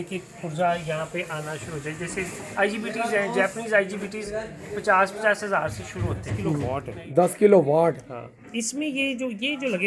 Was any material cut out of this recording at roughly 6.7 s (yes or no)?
yes